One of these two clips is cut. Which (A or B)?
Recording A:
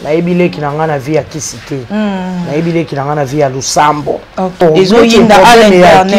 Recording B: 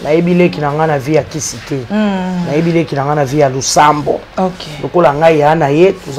A